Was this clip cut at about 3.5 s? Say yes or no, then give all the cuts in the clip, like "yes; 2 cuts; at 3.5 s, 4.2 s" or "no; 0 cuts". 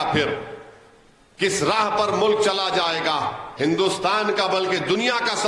yes; 1 cut; at 3.5 s